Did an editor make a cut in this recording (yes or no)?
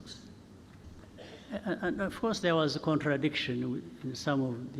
yes